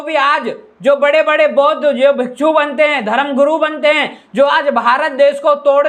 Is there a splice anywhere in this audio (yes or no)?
no